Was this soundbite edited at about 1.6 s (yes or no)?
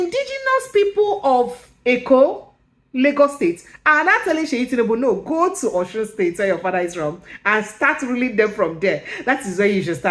yes